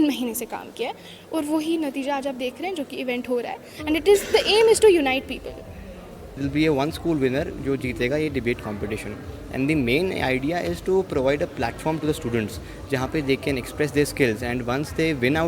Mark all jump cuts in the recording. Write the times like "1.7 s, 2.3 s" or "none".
6.4 s

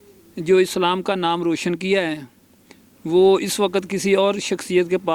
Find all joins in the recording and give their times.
none

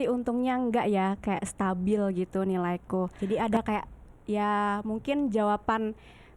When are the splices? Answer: 3.1 s

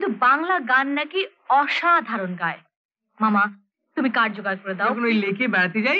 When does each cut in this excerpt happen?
5.0 s

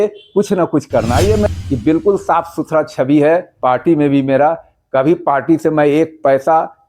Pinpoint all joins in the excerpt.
1.5 s

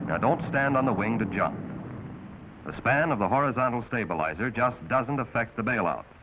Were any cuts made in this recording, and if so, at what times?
none

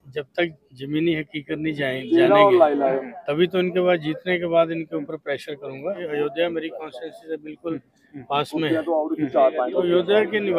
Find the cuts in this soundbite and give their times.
6.0 s

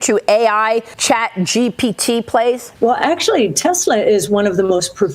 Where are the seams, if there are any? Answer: 0.9 s, 2.7 s

